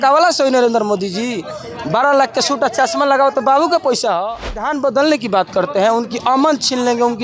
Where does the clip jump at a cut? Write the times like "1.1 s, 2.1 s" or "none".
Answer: 4.7 s